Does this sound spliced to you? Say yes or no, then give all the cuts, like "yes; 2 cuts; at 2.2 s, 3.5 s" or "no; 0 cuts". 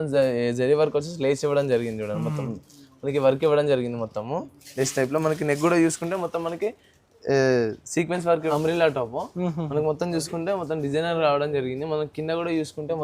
yes; 1 cut; at 8.5 s